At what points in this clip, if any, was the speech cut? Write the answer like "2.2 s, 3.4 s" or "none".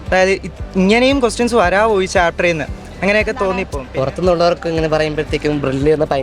3.7 s